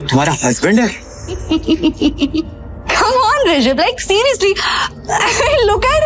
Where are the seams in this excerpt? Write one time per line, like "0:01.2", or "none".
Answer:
0:01.4